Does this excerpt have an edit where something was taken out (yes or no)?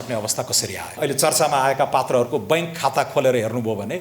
yes